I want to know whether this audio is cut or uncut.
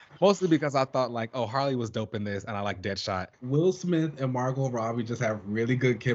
cut